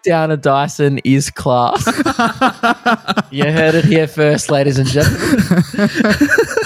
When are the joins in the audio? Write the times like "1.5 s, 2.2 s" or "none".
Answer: none